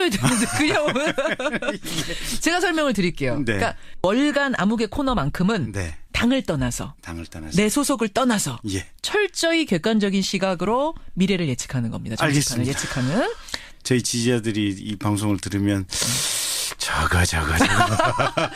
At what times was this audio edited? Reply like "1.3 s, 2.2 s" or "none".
none